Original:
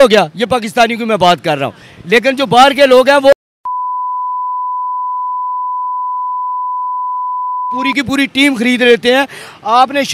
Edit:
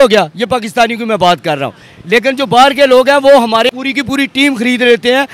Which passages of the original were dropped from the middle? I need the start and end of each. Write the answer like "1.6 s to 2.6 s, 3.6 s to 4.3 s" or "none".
3.7 s to 7.7 s